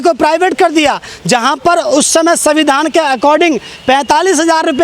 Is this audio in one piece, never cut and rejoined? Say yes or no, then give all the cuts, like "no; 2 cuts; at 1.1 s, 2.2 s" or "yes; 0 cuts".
yes; 0 cuts